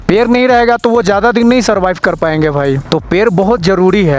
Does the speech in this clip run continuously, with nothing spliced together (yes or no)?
no